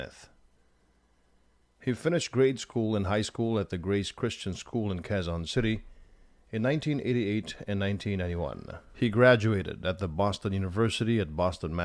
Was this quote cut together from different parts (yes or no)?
yes